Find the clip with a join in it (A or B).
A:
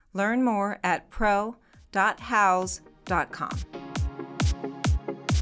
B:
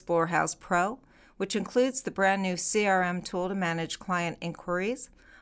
A